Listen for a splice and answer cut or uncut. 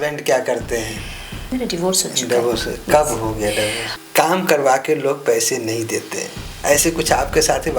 cut